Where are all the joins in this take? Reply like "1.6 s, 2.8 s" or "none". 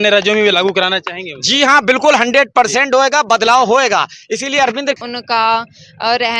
5.0 s